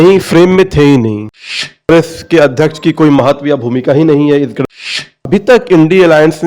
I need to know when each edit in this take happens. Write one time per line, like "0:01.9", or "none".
0:01.8
0:04.6